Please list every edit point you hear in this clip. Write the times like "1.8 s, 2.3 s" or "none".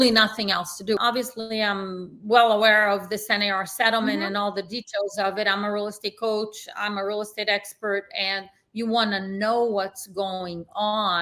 1.0 s